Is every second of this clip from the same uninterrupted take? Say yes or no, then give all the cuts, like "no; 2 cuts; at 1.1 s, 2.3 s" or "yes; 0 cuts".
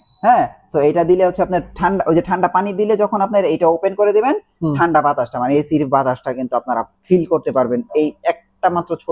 yes; 0 cuts